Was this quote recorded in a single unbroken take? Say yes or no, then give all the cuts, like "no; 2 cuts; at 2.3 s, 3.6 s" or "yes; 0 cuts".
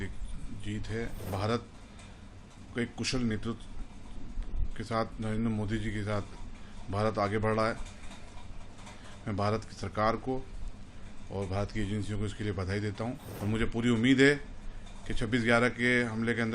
no; 2 cuts; at 1.3 s, 13.3 s